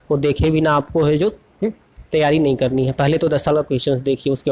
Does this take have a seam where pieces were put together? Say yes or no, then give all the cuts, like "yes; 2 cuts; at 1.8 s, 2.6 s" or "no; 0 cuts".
no; 0 cuts